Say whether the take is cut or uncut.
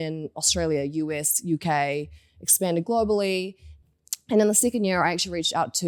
uncut